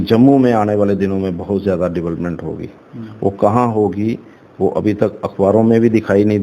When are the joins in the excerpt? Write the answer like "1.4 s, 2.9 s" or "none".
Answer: none